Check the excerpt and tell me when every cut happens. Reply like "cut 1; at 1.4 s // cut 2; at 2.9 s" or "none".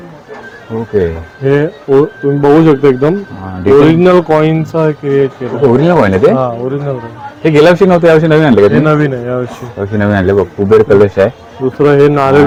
none